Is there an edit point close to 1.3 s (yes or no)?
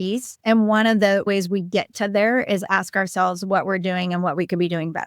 yes